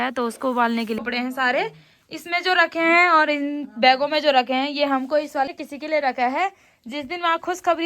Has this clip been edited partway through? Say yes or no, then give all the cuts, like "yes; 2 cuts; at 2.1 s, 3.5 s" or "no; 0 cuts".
yes; 2 cuts; at 1.0 s, 5.5 s